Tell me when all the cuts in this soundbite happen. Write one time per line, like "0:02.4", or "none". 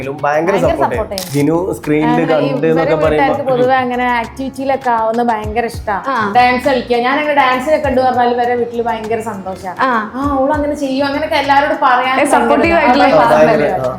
0:01.2

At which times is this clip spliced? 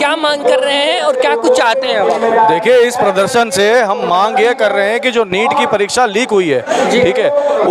none

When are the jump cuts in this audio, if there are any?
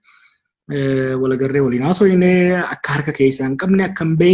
none

